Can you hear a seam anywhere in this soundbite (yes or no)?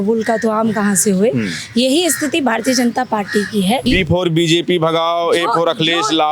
yes